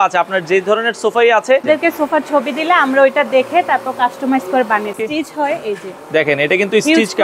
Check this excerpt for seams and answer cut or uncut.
cut